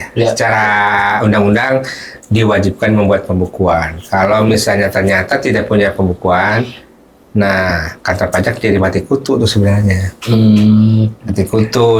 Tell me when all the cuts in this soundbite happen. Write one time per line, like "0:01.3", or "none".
none